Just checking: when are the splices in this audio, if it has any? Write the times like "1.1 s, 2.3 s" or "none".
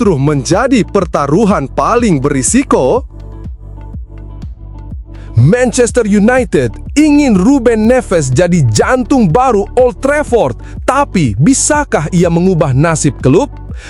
3.6 s, 5.3 s